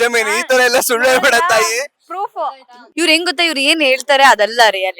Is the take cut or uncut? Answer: cut